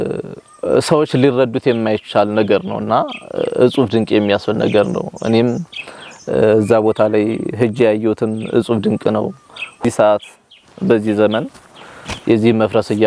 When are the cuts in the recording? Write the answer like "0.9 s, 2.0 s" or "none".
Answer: 9.8 s